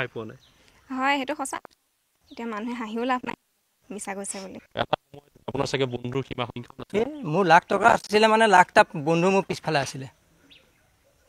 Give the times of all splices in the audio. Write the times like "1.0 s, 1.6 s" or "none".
4.6 s

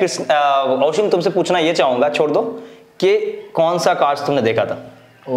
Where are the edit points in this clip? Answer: none

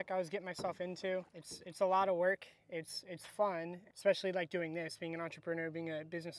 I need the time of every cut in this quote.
3.9 s

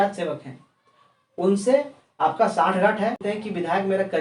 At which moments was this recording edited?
3.2 s

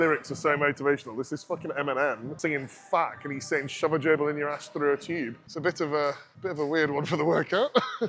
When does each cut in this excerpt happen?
2.3 s, 5.4 s, 6.3 s

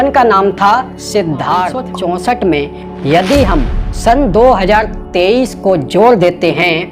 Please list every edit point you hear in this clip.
1.9 s

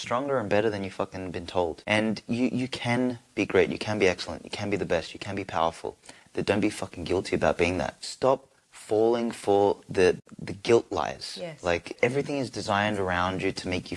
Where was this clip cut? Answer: 1.8 s, 8.0 s, 10.2 s, 11.9 s

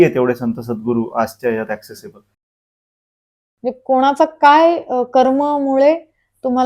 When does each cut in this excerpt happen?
2.9 s

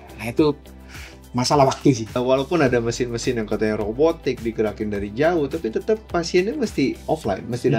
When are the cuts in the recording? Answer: 2.1 s

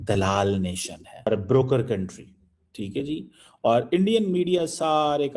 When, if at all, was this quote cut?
1.3 s

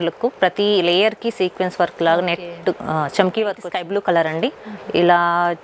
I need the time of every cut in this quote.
3.7 s

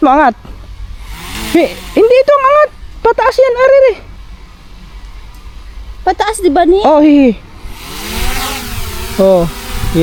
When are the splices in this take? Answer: none

